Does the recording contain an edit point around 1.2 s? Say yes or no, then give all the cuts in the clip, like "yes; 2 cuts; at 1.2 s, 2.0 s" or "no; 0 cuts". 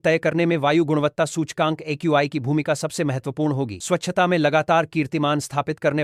no; 0 cuts